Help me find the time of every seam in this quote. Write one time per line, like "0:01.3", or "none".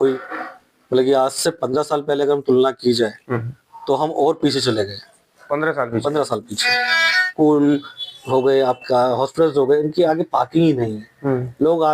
0:07.2